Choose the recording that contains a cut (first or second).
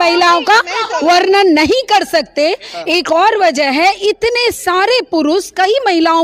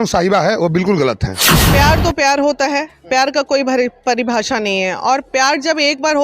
second